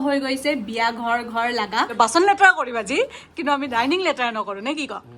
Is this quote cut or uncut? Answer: cut